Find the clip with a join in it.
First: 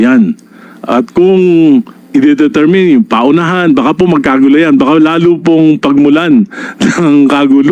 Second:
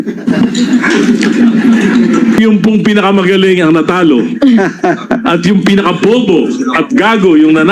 second; 1 cut; at 2.4 s

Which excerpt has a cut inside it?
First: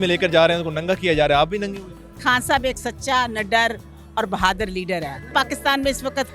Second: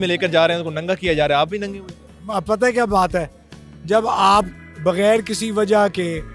first; 2 cuts; at 2.2 s, 5.3 s

